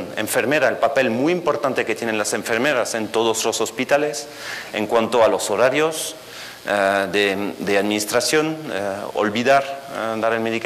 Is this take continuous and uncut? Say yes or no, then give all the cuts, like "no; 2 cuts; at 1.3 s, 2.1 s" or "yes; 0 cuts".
no; 1 cut; at 9.0 s